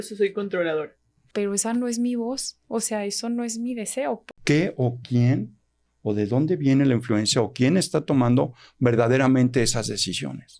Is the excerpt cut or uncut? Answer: cut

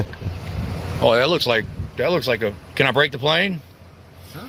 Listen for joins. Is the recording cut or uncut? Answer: uncut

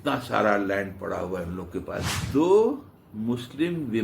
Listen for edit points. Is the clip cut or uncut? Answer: cut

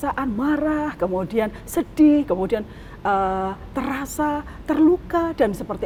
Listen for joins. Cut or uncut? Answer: uncut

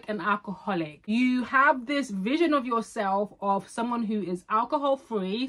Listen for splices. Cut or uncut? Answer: cut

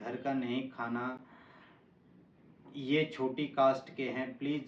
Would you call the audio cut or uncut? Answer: uncut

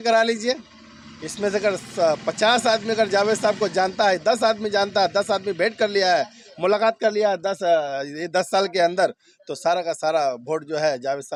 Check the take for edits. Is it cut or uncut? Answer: uncut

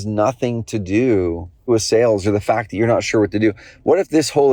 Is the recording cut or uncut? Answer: cut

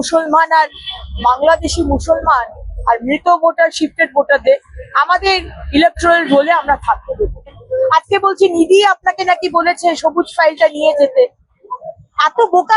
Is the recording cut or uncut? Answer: cut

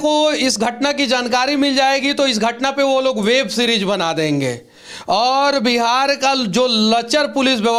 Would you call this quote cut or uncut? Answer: uncut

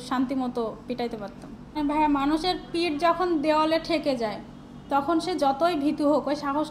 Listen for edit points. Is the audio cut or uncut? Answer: cut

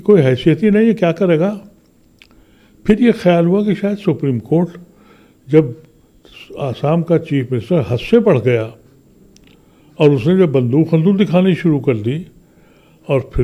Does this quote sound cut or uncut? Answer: uncut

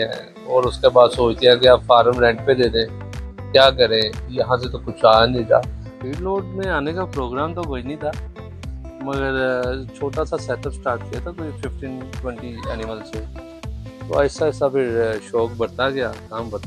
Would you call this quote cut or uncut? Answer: cut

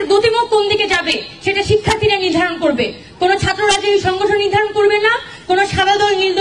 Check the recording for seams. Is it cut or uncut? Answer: uncut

